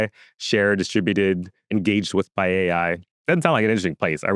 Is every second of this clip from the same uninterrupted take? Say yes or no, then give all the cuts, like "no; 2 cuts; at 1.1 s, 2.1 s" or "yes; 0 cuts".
no; 1 cut; at 3.1 s